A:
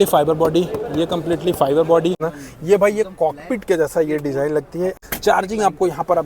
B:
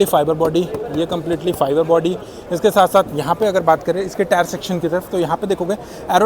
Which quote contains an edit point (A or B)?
A